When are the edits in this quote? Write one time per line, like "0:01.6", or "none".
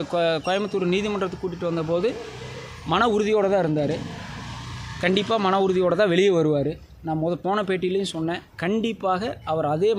none